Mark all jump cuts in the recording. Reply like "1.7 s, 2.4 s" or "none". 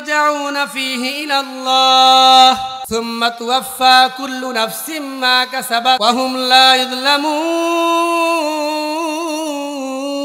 2.8 s, 6.0 s